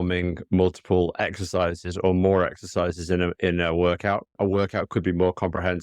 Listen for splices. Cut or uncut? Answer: cut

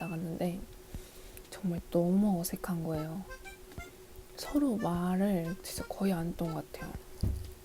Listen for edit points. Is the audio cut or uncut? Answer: uncut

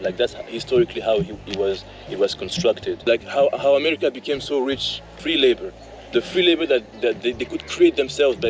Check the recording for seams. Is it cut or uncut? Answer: cut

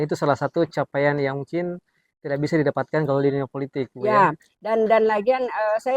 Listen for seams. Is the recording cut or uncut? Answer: uncut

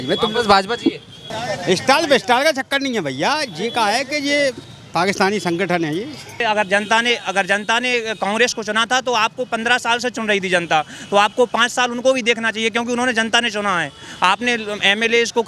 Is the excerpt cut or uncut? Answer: cut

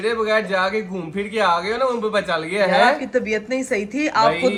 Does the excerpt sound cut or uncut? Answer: uncut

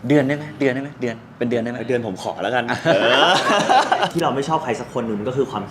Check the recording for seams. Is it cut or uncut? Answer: cut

